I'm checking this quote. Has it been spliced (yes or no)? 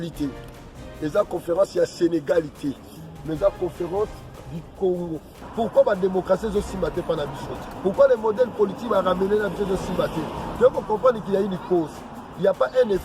yes